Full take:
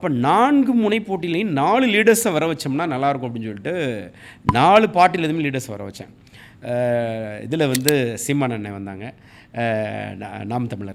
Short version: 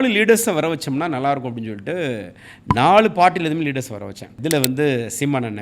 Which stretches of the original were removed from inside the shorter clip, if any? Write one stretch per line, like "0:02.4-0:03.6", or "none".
0:06.0-0:07.3